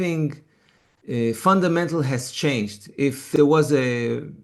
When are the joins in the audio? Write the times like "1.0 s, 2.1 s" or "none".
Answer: 3.2 s